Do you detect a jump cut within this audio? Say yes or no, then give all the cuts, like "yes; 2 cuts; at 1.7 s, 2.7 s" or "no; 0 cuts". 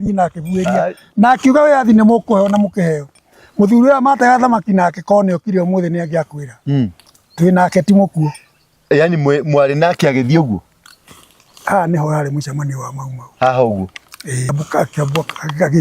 yes; 1 cut; at 14.5 s